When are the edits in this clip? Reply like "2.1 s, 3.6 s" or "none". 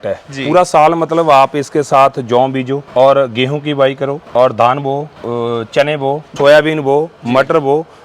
2.8 s, 4.2 s, 5.1 s, 6.3 s